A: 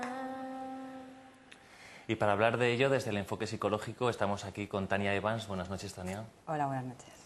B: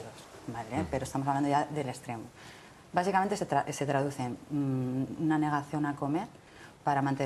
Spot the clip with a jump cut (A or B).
B